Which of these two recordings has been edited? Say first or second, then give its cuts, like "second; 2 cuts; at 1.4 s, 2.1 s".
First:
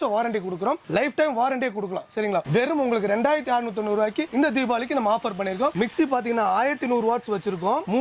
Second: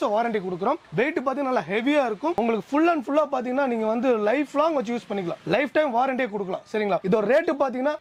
first; 3 cuts; at 0.8 s, 2.5 s, 5.8 s